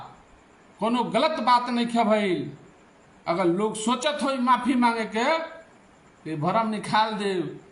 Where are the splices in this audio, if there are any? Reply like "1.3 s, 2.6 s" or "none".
none